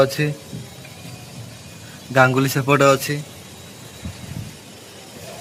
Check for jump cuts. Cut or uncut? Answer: uncut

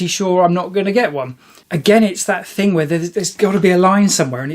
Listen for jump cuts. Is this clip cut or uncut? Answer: cut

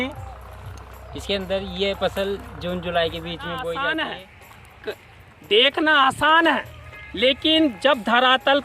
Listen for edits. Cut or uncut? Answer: cut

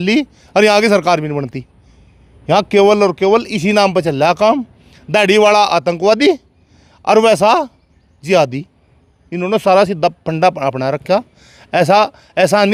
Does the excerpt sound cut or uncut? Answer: uncut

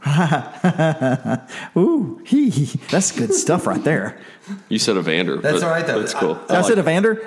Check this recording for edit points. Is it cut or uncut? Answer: cut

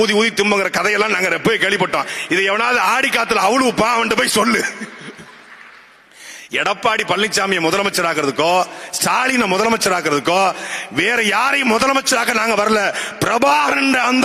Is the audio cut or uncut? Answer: uncut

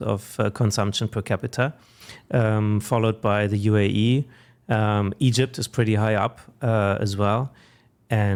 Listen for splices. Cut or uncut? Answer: uncut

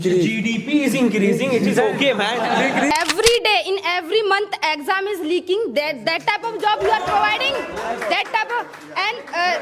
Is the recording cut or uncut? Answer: cut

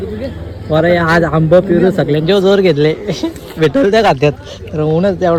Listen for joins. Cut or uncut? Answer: uncut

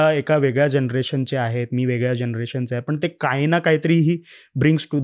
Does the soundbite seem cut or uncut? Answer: uncut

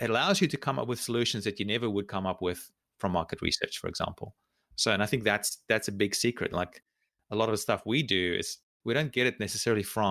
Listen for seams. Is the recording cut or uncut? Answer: cut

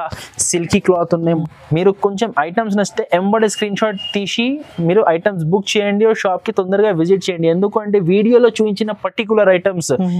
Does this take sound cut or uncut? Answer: cut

